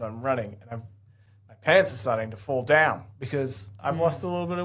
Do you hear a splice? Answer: no; 0 cuts

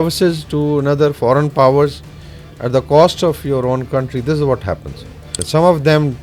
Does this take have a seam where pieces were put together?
yes; 1 cut; at 5.3 s

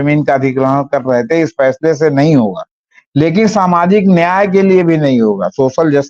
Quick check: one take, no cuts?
yes; 0 cuts

